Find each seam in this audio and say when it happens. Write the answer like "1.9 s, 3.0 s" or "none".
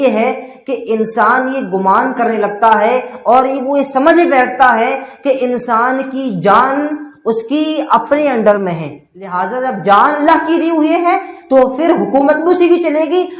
9.4 s